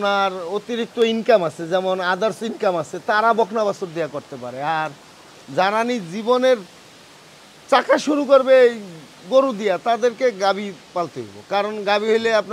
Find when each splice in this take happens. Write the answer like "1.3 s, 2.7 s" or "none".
none